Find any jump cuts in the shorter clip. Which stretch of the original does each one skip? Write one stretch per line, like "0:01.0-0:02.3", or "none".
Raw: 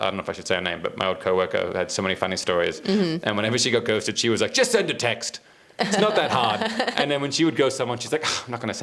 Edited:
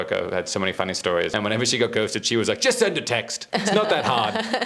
0:02.7-0:03.2
0:05.3-0:05.6